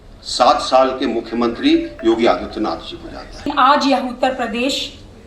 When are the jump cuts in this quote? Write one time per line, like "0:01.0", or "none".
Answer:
0:03.5

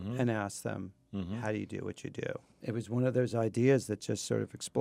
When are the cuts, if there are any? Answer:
none

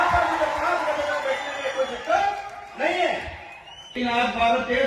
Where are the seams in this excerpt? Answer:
0:03.9

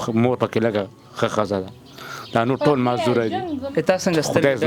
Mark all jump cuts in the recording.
0:03.6

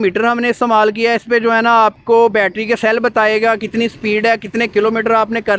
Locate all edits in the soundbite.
none

